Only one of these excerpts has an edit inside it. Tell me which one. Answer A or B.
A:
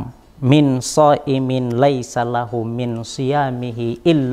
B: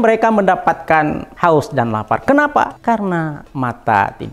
B